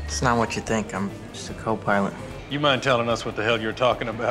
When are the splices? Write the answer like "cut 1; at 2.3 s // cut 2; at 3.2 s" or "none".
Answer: cut 1; at 2.3 s

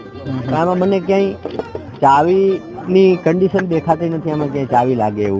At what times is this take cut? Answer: none

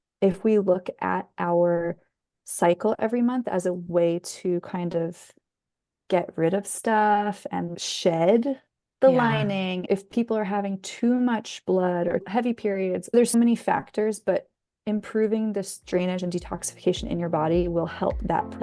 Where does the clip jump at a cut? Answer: cut 1; at 9.8 s // cut 2; at 13.3 s

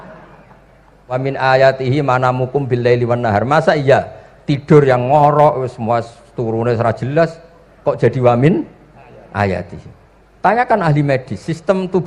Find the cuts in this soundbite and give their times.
cut 1; at 1.2 s

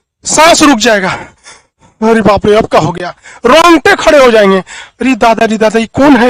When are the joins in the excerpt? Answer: none

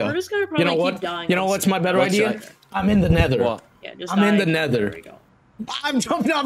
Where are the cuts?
none

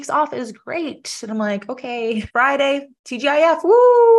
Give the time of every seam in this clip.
cut 1; at 2.3 s // cut 2; at 3.0 s

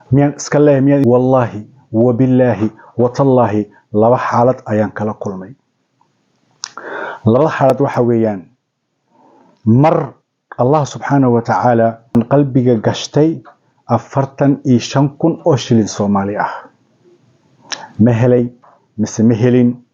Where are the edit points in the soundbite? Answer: cut 1; at 1.0 s // cut 2; at 12.1 s

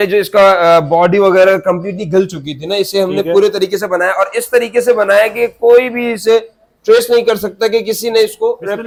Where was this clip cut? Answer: none

